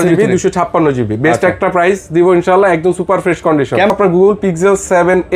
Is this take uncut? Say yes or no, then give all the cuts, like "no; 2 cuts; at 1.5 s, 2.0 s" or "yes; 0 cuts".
no; 1 cut; at 3.9 s